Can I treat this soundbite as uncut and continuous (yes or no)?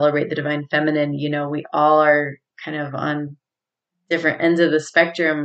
yes